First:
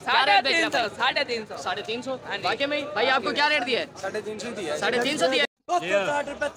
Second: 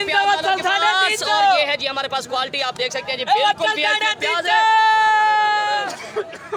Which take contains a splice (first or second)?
first